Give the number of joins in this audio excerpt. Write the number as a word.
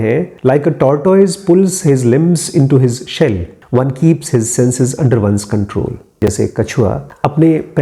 one